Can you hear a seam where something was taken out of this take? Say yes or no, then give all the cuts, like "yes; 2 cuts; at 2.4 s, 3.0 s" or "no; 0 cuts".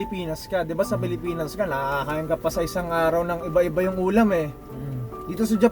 no; 0 cuts